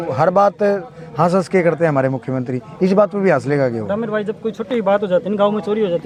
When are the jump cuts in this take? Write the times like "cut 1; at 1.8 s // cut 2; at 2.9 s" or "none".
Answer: none